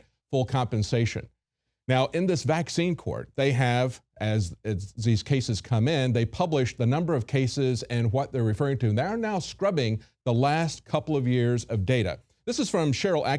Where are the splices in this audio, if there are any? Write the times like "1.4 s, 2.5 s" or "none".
3.2 s